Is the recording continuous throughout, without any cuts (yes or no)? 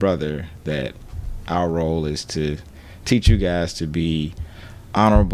yes